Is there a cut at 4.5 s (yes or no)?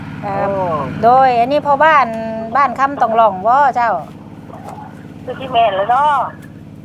no